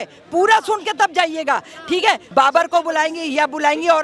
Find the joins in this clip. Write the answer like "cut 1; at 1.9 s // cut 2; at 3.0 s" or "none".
cut 1; at 2.2 s